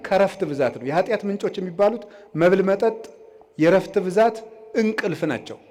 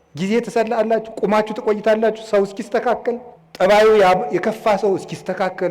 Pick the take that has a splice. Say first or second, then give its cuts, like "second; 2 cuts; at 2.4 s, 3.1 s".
second; 1 cut; at 3.4 s